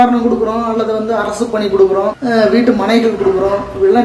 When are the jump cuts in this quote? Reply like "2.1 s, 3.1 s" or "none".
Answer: 2.2 s